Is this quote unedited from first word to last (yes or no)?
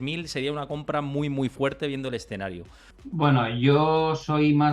no